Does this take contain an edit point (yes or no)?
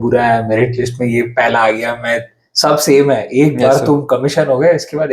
no